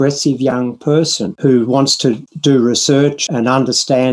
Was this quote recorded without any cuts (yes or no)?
no